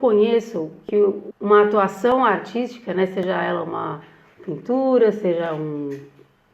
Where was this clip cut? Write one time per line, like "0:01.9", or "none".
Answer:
0:01.2